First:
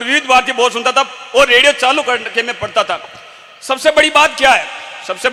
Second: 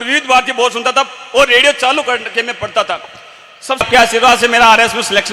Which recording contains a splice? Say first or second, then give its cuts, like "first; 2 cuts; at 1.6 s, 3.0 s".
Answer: second; 1 cut; at 3.8 s